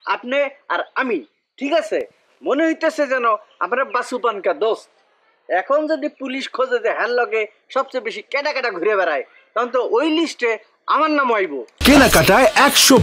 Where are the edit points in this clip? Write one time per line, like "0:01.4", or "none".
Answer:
0:11.7